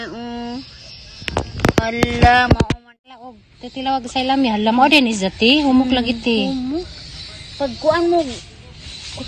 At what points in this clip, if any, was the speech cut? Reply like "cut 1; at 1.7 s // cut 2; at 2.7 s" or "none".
cut 1; at 3.3 s